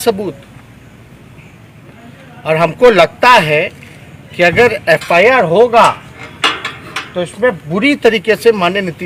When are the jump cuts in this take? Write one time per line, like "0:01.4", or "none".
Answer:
none